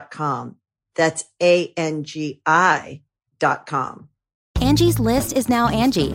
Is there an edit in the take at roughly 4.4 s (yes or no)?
yes